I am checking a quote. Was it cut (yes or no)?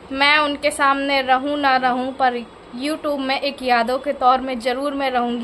no